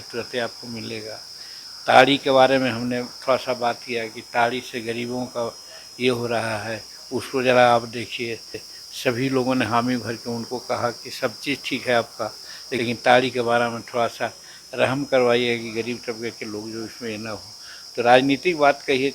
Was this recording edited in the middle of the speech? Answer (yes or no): no